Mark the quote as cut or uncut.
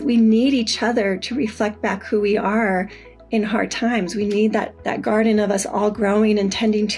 cut